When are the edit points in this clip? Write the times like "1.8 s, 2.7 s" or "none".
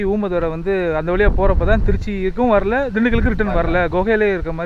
none